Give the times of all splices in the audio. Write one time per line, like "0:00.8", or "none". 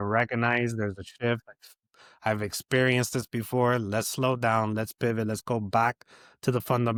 none